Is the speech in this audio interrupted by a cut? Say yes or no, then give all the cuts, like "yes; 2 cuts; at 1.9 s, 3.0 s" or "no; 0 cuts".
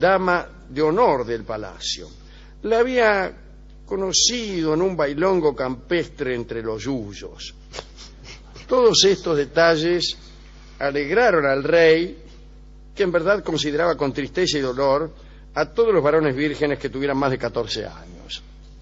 no; 0 cuts